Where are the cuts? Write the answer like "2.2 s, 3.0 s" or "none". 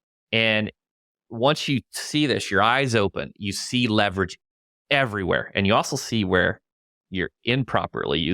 none